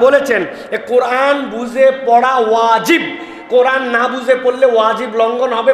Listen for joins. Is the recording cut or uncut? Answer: uncut